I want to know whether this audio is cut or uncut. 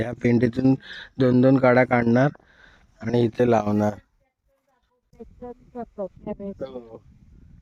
cut